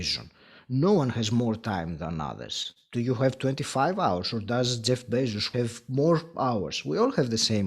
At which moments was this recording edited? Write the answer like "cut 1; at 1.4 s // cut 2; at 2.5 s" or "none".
cut 1; at 5.5 s